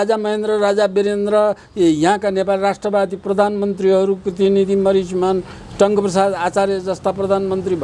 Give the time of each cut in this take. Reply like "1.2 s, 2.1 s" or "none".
none